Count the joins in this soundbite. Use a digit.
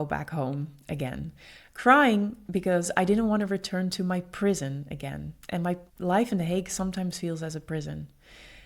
1